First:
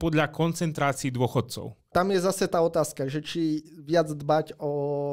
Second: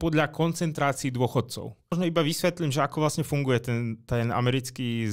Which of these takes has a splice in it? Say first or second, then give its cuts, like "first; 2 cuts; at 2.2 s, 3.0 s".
first; 1 cut; at 1.9 s